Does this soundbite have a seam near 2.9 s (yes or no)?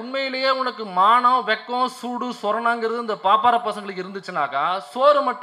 no